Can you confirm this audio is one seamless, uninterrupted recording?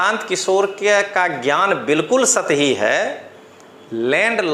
yes; 0 cuts

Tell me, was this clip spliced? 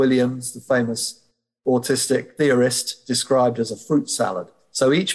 no; 0 cuts

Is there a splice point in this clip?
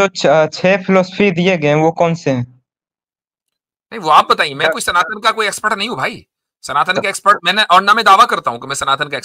no; 0 cuts

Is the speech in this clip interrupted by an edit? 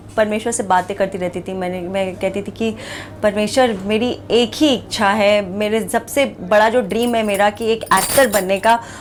no; 0 cuts

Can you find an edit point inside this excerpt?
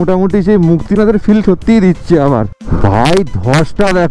yes; 1 cut; at 2.6 s

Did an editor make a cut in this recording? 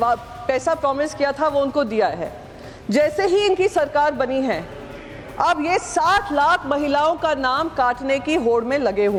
no; 0 cuts

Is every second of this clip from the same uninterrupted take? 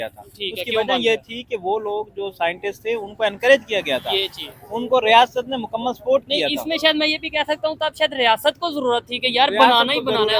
yes; 0 cuts

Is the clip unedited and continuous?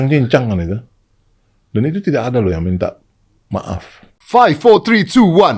no; 1 cut; at 4.2 s

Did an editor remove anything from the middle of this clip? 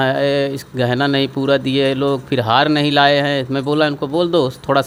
no; 0 cuts

